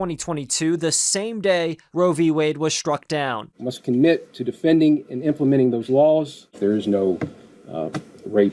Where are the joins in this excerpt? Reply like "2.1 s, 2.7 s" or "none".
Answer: none